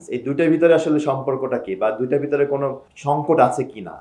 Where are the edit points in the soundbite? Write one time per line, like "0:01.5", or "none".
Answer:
0:02.9